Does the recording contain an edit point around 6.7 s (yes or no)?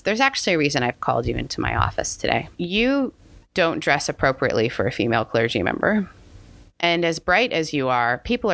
yes